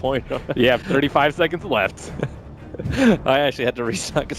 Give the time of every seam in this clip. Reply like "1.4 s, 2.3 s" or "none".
2.5 s